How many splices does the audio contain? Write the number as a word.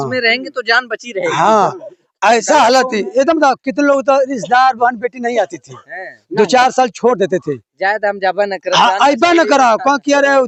zero